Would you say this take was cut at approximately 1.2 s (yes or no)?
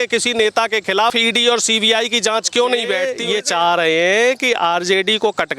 yes